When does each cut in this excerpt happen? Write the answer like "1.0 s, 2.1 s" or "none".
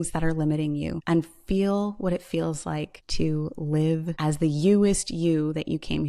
1.0 s, 3.0 s, 4.1 s